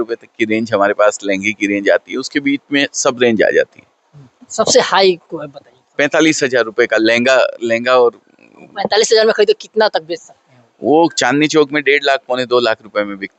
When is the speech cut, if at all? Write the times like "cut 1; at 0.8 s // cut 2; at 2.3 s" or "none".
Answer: none